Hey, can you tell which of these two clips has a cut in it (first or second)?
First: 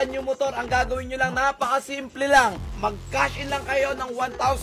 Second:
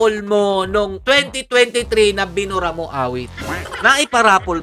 second